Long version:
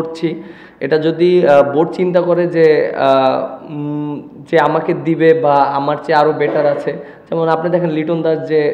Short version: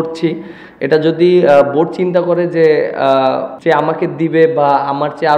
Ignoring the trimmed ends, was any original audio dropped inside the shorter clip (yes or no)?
yes